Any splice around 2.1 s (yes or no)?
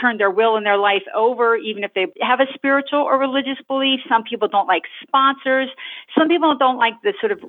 yes